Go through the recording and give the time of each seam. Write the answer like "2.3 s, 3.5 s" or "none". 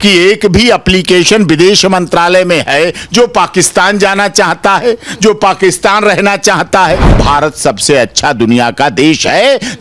7.1 s